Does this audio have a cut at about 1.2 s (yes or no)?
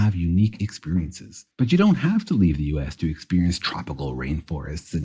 no